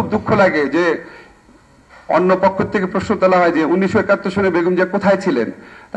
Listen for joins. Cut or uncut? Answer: uncut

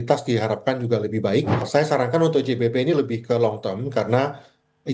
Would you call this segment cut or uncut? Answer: cut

